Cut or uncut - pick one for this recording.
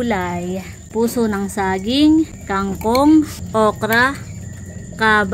cut